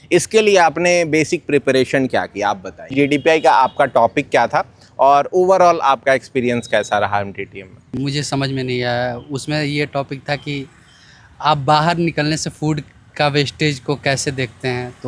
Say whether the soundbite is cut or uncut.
cut